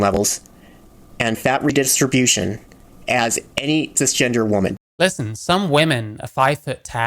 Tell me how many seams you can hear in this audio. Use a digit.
1